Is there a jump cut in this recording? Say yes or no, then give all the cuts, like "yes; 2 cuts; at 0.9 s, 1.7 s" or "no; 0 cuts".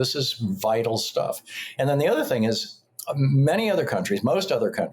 no; 0 cuts